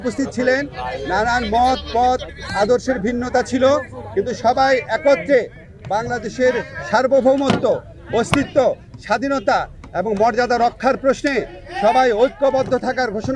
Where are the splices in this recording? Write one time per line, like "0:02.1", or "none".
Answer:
none